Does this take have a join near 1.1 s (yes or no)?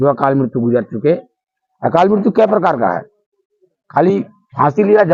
no